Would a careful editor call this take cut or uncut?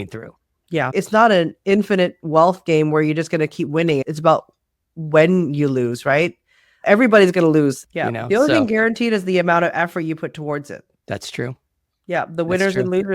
cut